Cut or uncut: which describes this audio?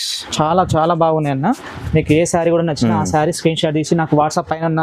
uncut